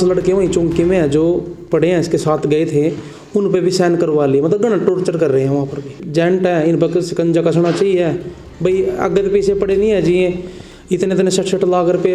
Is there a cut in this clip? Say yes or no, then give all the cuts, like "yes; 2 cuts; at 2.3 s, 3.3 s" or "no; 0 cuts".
yes; 1 cut; at 6.0 s